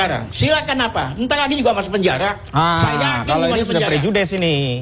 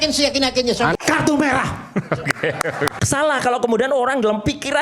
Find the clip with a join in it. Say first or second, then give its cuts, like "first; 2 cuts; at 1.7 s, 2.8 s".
second; 2 cuts; at 0.9 s, 2.9 s